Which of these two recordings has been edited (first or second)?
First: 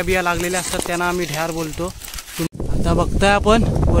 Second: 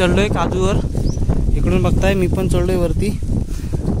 first